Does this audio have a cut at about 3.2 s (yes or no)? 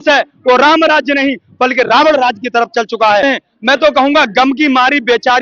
yes